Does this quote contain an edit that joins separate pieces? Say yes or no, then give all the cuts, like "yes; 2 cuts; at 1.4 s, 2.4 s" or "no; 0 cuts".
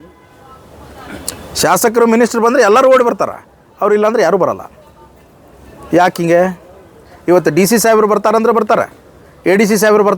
no; 0 cuts